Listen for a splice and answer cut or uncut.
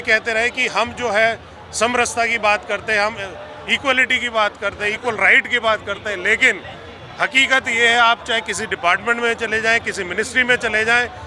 uncut